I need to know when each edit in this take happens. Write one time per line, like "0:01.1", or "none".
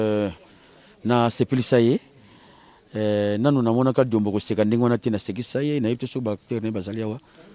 none